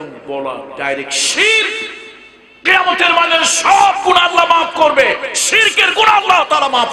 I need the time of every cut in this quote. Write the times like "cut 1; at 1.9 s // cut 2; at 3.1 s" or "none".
none